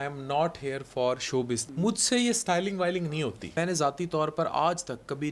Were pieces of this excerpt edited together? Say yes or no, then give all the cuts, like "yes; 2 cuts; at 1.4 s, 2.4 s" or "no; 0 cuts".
yes; 2 cuts; at 1.7 s, 3.5 s